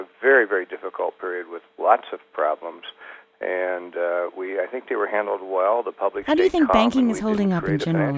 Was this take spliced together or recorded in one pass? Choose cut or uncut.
cut